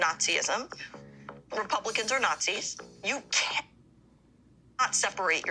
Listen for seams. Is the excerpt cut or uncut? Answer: uncut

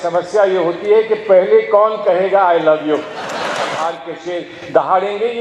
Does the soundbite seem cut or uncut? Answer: cut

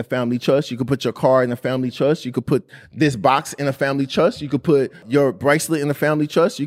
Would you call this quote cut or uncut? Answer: cut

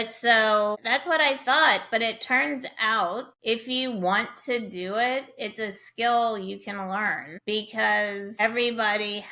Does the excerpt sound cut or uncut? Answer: cut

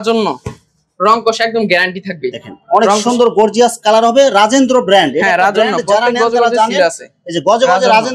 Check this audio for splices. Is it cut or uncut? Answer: uncut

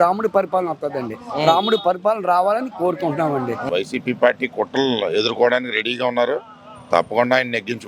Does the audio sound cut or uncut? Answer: cut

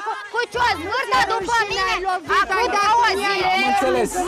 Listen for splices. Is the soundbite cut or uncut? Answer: uncut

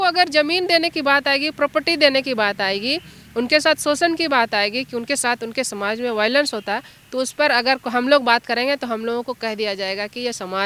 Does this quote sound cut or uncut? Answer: uncut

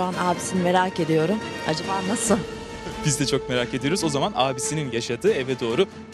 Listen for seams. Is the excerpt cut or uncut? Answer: uncut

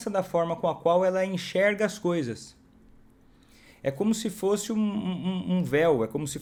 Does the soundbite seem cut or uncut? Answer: uncut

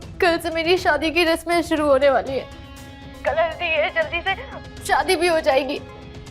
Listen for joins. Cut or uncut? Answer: uncut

